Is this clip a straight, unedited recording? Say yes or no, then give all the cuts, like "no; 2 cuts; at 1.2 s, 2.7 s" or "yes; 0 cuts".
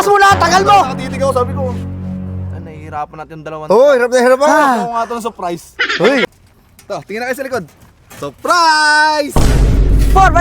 no; 1 cut; at 6.3 s